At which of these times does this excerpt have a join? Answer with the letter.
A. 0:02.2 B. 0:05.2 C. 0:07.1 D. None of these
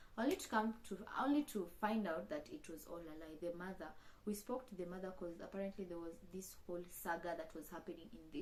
D